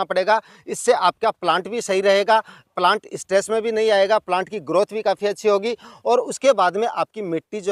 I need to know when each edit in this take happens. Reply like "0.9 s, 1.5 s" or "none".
none